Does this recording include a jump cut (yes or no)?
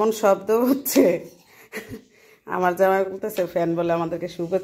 no